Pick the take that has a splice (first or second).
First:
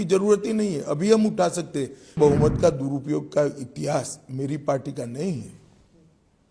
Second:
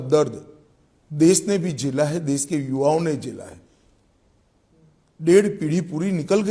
first